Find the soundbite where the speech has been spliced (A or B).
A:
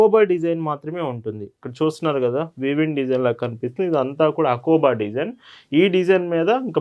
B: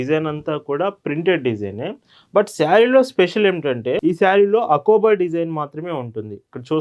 B